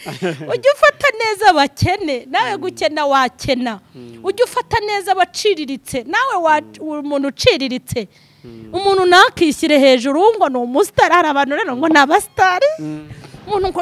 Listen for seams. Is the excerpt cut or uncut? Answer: uncut